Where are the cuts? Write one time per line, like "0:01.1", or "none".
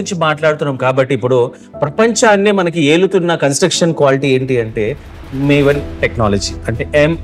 none